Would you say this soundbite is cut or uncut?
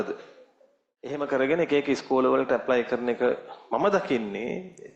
cut